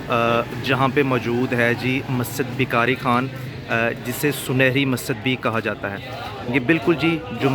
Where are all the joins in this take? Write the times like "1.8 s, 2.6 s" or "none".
none